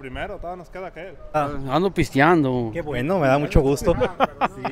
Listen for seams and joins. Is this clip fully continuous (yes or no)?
no